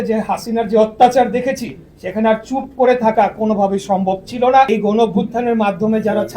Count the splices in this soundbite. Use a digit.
1